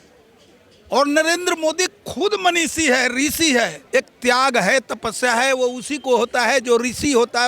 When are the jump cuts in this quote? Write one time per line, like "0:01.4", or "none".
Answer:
0:03.8